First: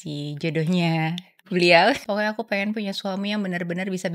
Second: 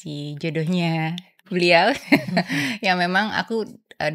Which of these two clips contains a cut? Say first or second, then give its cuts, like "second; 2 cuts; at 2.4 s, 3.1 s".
first; 1 cut; at 2.0 s